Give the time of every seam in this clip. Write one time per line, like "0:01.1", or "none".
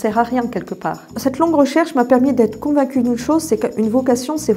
0:01.1